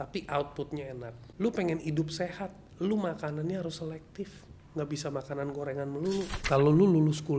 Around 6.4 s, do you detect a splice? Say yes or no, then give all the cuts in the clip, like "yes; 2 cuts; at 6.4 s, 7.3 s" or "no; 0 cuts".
yes; 2 cuts; at 1.2 s, 6.4 s